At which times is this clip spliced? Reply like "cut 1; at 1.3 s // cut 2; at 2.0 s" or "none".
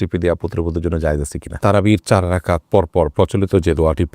cut 1; at 1.5 s